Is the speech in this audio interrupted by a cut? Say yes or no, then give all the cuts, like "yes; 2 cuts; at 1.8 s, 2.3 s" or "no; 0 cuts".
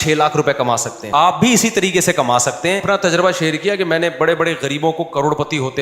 yes; 2 cuts; at 0.9 s, 2.8 s